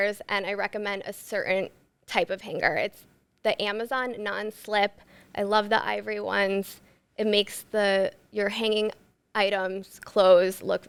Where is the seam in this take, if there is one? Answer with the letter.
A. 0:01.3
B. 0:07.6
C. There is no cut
C